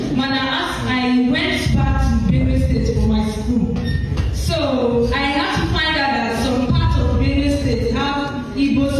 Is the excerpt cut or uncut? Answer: uncut